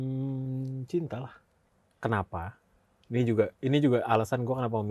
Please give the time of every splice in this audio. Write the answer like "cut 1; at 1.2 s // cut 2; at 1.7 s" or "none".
cut 1; at 1.6 s